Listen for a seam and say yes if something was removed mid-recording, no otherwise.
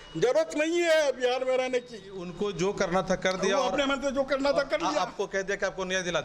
yes